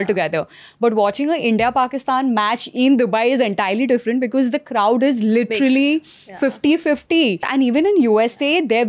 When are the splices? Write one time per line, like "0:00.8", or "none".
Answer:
0:07.5